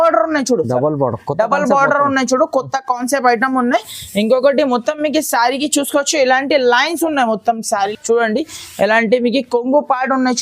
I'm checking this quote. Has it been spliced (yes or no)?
yes